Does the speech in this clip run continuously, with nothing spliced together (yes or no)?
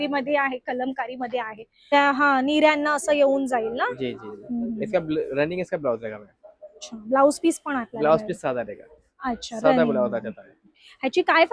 no